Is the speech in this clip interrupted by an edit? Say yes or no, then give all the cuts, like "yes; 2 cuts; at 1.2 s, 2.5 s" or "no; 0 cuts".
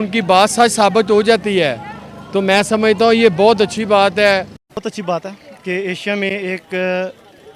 yes; 1 cut; at 4.6 s